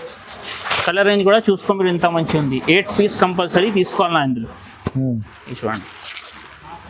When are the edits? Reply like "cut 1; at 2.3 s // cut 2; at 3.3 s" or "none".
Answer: none